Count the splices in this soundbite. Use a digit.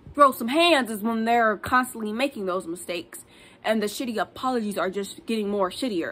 0